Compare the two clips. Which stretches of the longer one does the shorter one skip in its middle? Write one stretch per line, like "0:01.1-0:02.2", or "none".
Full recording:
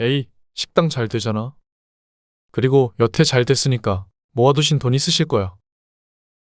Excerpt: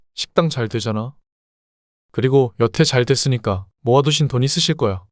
0:04.1-0:04.2